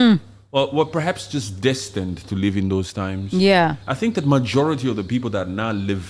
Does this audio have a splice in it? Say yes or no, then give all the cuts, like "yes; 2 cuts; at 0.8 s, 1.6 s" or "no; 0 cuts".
no; 0 cuts